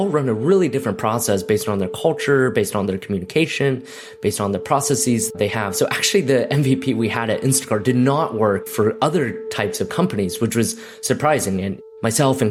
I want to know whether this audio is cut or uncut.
uncut